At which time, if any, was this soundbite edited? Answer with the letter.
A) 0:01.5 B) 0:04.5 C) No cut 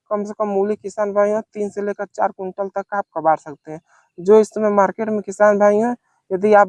C